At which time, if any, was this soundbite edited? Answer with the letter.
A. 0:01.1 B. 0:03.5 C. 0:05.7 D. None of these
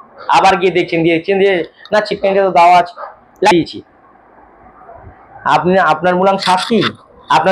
B